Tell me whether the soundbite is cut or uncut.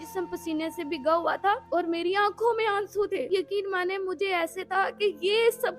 cut